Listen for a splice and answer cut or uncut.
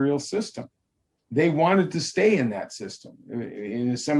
uncut